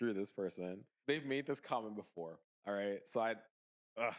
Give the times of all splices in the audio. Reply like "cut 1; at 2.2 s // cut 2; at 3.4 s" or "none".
cut 1; at 0.9 s

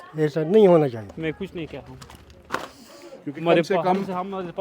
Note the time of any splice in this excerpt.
cut 1; at 1.1 s

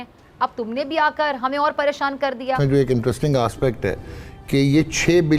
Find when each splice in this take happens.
cut 1; at 2.6 s

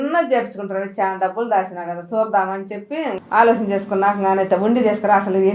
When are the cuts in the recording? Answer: cut 1; at 3.2 s

